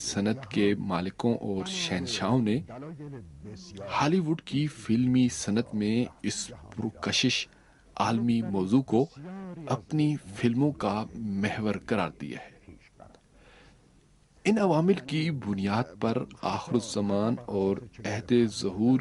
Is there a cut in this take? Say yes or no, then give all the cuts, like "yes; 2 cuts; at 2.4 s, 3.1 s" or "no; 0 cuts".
yes; 1 cut; at 5.9 s